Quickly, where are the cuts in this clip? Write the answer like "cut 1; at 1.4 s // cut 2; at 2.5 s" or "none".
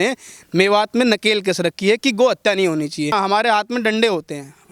cut 1; at 3.1 s